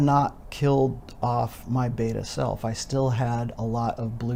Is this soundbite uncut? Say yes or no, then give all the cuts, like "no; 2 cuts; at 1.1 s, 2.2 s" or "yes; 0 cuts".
yes; 0 cuts